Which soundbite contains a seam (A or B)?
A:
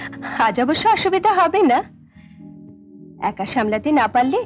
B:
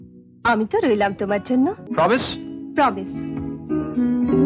B